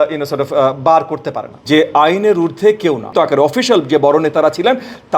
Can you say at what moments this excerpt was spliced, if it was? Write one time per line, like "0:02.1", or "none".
0:01.6
0:03.1